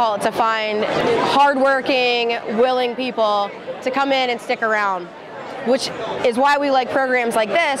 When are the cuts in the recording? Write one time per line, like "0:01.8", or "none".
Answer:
0:01.0